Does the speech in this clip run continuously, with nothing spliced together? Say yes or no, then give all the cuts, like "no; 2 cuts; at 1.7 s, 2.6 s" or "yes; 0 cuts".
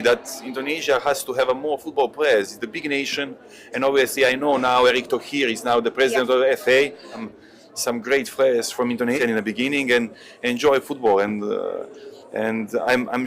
no; 2 cuts; at 7.3 s, 9.2 s